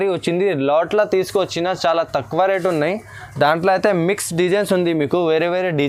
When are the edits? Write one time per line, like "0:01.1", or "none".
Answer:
none